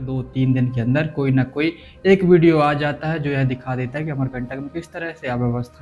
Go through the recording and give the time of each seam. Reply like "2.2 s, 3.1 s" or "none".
none